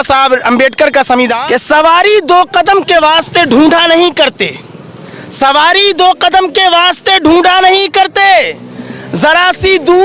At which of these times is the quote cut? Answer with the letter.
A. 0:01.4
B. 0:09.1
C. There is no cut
A